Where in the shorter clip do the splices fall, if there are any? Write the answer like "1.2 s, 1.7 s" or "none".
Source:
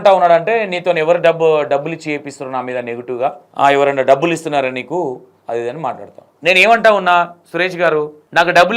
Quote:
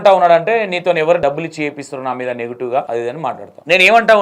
1.2 s, 3.1 s